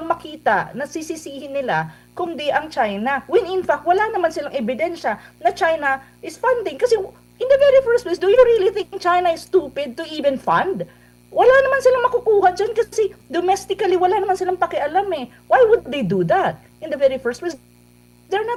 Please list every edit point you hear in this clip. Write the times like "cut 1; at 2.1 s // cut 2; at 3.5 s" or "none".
none